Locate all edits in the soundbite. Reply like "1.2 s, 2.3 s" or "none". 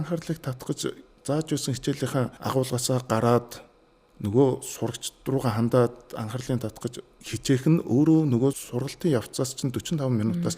2.4 s, 7.1 s, 8.6 s